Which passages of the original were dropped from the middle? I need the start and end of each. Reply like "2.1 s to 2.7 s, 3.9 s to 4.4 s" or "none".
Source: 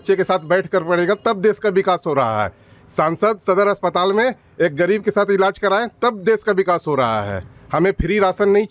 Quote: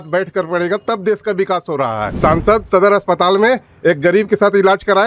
2.5 s to 2.8 s